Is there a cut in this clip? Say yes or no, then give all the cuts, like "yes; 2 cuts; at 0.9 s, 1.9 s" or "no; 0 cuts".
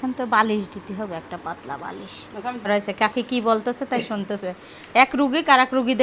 yes; 1 cut; at 2.7 s